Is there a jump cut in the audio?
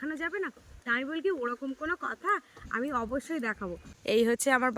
yes; 1 cut; at 3.9 s

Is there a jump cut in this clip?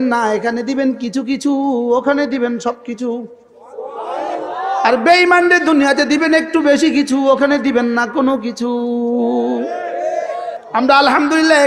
yes; 1 cut; at 10.6 s

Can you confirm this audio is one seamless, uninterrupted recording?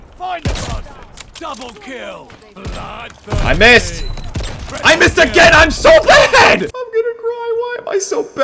no; 1 cut; at 6.7 s

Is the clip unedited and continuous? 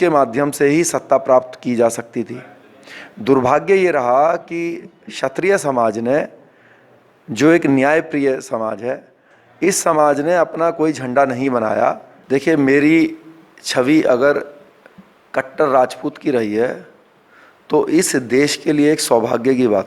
no; 1 cut; at 12.1 s

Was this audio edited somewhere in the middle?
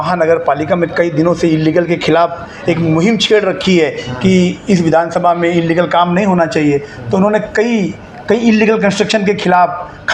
no; 0 cuts

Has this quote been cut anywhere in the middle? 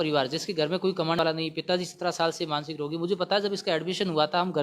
yes; 1 cut; at 1.2 s

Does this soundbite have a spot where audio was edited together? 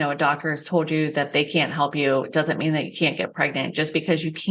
no; 0 cuts

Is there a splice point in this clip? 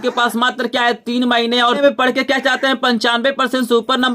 yes; 1 cut; at 1.8 s

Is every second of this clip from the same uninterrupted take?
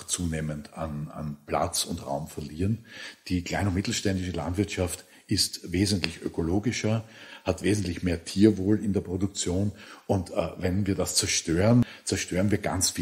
no; 3 cuts; at 7.2 s, 9.8 s, 11.9 s

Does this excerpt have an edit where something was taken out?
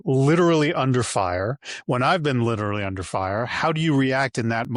no; 0 cuts

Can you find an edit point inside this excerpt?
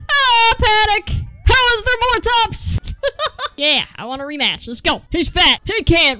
no; 0 cuts

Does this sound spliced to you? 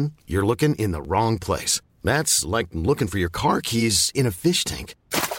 no; 0 cuts

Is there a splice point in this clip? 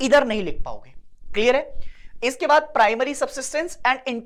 no; 0 cuts

